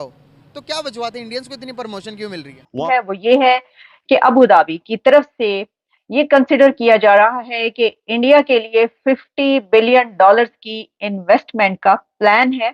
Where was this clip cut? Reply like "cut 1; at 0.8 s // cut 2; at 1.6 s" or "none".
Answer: cut 1; at 2.8 s